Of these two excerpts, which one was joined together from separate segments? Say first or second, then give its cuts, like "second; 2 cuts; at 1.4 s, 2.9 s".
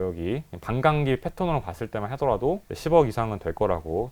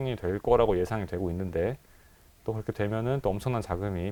first; 1 cut; at 2.7 s